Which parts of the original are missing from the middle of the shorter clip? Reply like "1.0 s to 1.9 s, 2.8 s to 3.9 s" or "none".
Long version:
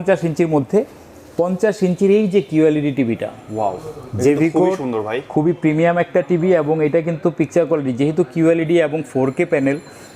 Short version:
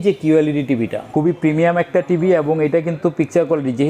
3.3 s to 5.2 s